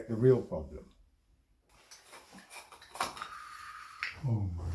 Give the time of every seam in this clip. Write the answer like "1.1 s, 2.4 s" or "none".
1.8 s